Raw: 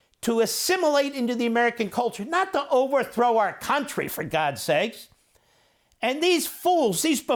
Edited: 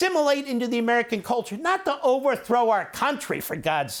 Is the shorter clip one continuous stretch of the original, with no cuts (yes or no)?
yes